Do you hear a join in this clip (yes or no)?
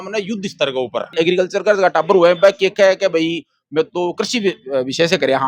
yes